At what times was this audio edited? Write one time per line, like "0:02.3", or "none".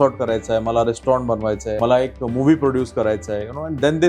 0:01.7